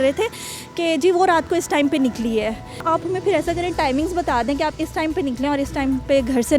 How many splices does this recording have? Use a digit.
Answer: 1